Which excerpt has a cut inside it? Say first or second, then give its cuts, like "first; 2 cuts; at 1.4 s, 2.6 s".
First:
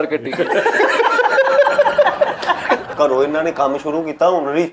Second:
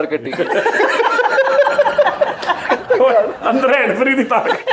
first; 1 cut; at 2.8 s